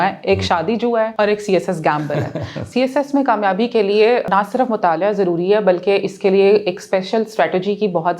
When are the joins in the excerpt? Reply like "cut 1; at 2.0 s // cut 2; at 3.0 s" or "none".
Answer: cut 1; at 1.1 s // cut 2; at 2.7 s // cut 3; at 4.3 s